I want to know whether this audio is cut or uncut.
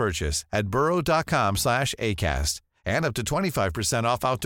uncut